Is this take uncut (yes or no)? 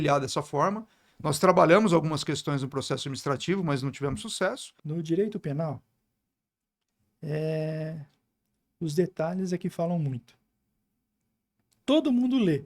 no